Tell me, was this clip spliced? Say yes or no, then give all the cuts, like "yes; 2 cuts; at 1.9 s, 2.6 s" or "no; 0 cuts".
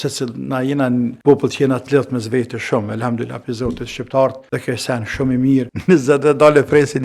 yes; 2 cuts; at 1.2 s, 5.7 s